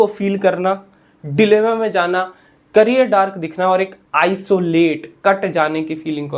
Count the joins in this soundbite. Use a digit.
0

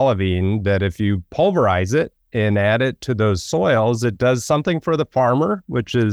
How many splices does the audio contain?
0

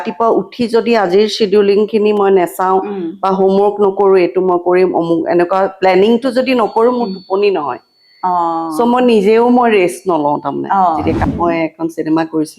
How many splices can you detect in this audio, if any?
1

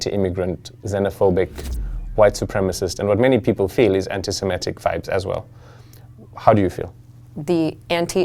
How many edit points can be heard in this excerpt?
1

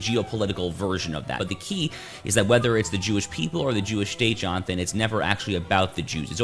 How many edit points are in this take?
1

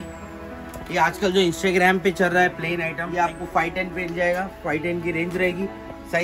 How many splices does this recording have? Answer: 1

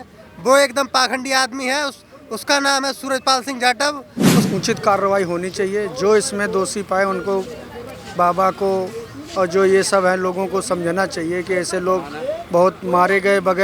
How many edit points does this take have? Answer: 1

